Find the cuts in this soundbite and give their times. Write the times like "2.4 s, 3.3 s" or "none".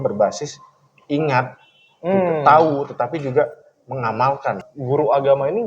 4.7 s

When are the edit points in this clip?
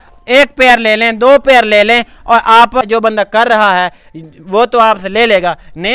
2.8 s

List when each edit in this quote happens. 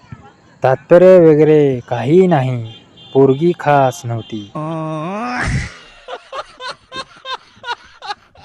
4.5 s

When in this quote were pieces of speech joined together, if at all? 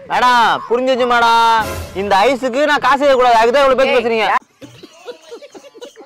4.4 s

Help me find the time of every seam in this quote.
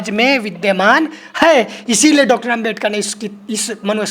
none

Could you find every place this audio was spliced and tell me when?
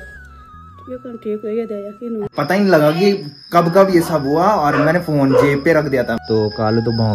2.3 s, 6.2 s

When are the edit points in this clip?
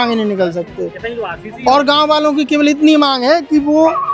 none

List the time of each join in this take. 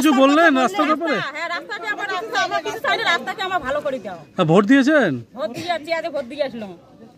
none

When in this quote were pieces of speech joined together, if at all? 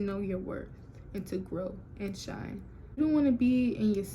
3.0 s

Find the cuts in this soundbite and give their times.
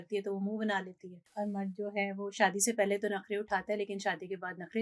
1.2 s

